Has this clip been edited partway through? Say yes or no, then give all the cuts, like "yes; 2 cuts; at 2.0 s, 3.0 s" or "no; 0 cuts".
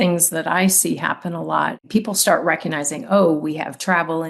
yes; 1 cut; at 1.8 s